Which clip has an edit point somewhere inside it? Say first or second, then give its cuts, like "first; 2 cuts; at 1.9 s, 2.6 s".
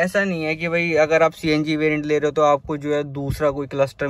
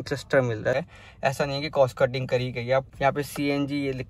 second; 2 cuts; at 0.7 s, 2.9 s